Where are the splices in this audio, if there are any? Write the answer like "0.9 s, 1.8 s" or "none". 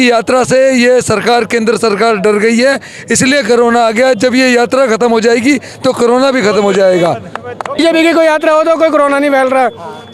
7.8 s